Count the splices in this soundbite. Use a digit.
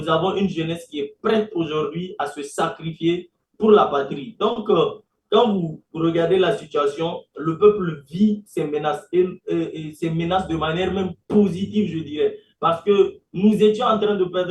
0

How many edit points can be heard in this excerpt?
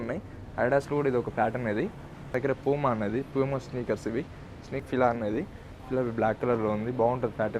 2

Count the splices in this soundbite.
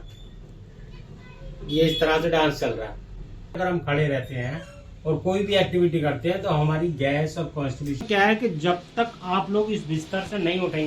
2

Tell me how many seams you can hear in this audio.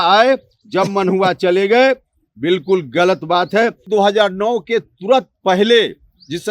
1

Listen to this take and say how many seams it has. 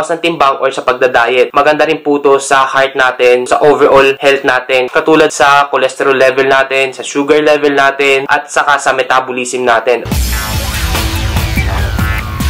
2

